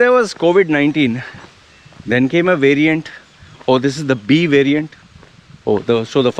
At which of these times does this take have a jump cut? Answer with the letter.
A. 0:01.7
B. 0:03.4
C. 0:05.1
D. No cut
D